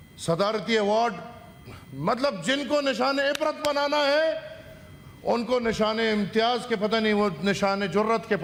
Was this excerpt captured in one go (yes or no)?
yes